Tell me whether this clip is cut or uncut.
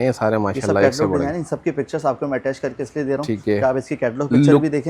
uncut